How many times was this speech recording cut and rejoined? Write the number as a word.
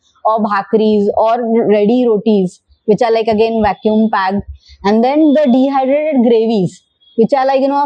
zero